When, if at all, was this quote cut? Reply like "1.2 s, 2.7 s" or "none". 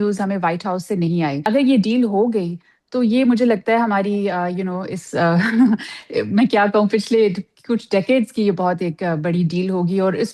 1.4 s